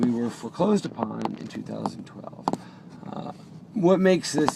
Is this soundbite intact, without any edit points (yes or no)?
no